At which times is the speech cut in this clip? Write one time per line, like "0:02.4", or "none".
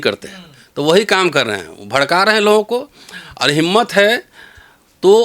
none